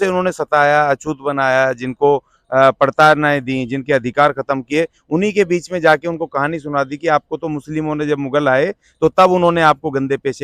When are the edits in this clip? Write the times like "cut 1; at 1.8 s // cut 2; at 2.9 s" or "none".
none